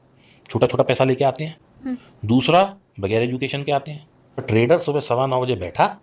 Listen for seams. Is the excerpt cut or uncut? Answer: cut